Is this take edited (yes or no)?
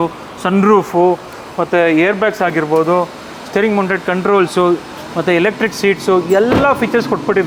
no